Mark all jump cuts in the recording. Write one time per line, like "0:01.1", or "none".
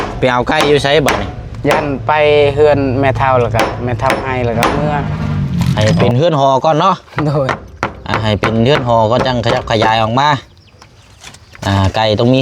0:05.7